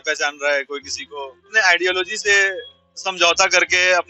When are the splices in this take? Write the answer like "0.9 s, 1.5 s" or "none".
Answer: 1.5 s